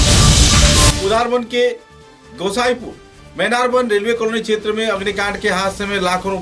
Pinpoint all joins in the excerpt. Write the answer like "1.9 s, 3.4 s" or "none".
1.0 s